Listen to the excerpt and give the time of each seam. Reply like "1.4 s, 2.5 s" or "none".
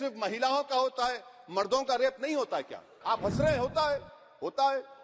2.9 s